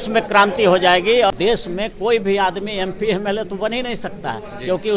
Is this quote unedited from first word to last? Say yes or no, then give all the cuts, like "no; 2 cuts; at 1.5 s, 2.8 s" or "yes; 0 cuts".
no; 1 cut; at 1.3 s